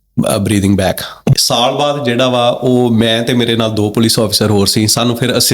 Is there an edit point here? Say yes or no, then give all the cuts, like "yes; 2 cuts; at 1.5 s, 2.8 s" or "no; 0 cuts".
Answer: yes; 1 cut; at 1.3 s